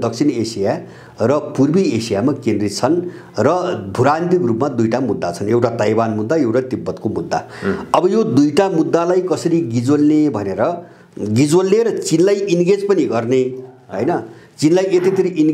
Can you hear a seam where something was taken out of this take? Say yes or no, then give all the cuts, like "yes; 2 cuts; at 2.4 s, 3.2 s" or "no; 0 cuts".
no; 0 cuts